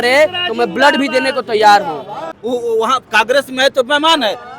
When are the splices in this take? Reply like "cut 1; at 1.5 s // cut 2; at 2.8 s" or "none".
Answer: cut 1; at 2.3 s